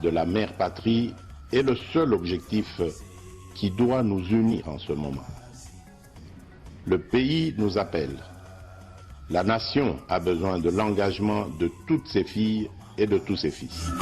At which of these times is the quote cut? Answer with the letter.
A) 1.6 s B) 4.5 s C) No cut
B